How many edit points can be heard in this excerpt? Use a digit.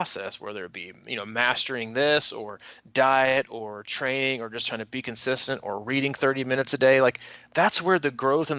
0